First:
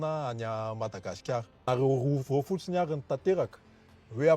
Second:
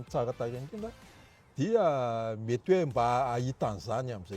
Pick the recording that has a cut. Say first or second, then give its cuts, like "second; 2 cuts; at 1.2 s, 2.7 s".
first; 1 cut; at 1.6 s